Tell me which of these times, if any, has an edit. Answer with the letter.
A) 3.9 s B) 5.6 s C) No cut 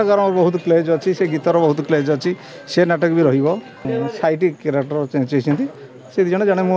A